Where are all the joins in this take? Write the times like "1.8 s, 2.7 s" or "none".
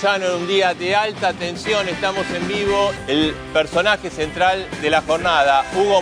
3.0 s